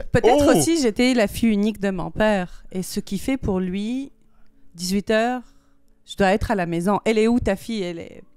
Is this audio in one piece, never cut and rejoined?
yes; 0 cuts

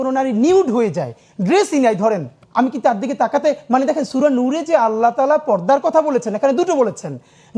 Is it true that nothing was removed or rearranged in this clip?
no; 1 cut; at 2.4 s

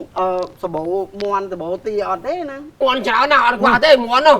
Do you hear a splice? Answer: yes; 1 cut; at 2.8 s

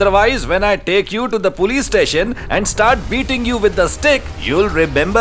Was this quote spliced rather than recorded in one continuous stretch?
no; 0 cuts

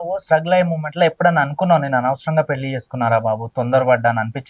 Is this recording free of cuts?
yes; 0 cuts

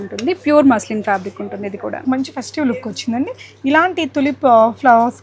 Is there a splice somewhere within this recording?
yes; 1 cut; at 2.0 s

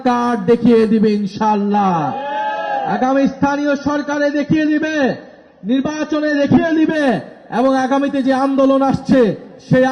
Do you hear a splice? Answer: no; 0 cuts

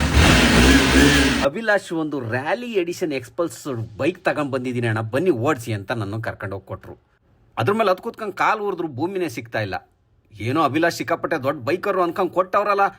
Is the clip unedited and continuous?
no; 1 cut; at 1.4 s

